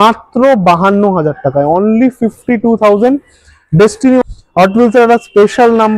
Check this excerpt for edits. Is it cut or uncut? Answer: cut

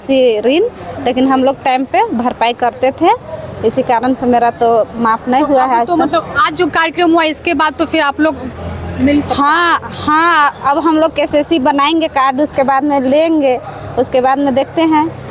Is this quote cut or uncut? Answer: uncut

